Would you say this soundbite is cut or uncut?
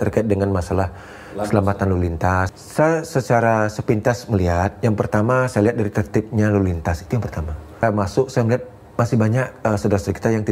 cut